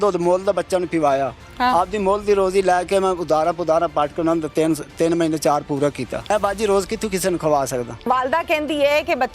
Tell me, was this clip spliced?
yes; 2 cuts; at 6.3 s, 8.0 s

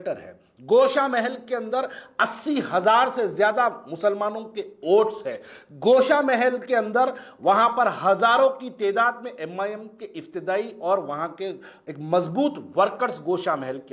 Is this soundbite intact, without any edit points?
yes; 0 cuts

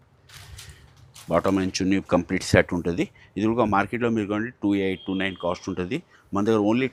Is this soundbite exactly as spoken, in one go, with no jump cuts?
yes; 0 cuts

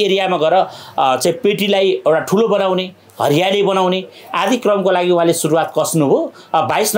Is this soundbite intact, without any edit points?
yes; 0 cuts

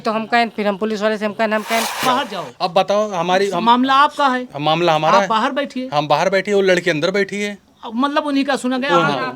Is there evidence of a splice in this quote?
yes; 1 cut; at 2.0 s

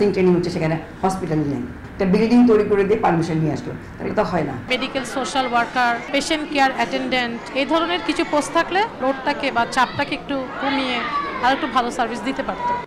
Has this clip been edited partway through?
yes; 5 cuts; at 1.8 s, 4.6 s, 6.1 s, 7.4 s, 8.9 s

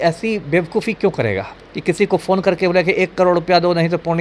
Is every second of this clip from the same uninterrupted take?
yes; 0 cuts

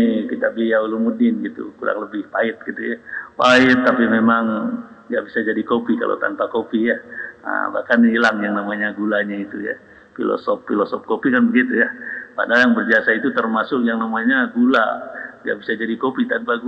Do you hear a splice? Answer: no; 0 cuts

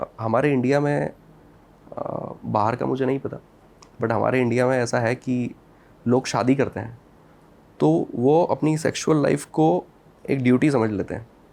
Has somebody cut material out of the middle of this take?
no; 0 cuts

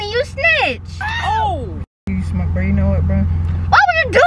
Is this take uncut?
yes; 0 cuts

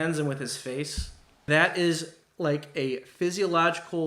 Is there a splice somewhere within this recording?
yes; 1 cut; at 1.4 s

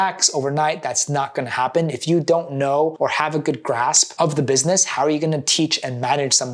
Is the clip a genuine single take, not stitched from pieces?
no; 1 cut; at 2.9 s

